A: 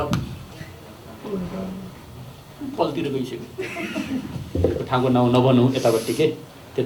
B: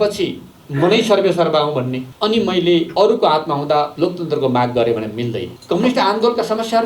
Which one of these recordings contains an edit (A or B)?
B